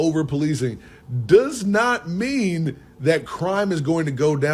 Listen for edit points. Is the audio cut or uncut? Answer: uncut